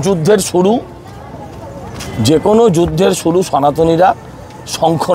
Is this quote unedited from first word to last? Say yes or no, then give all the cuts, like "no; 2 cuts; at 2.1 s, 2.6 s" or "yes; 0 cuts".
yes; 0 cuts